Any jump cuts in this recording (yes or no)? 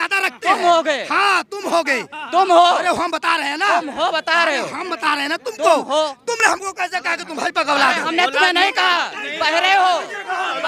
no